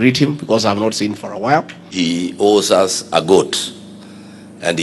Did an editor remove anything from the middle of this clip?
yes; 1 cut; at 1.8 s

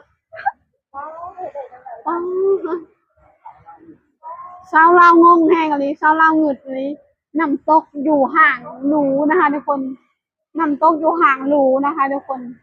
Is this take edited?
no; 0 cuts

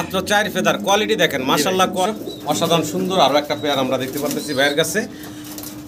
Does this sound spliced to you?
yes; 1 cut; at 2.0 s

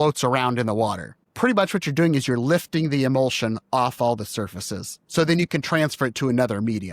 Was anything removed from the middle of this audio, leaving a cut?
yes; 1 cut; at 1.2 s

